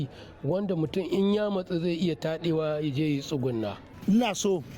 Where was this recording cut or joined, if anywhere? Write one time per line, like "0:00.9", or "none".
0:03.8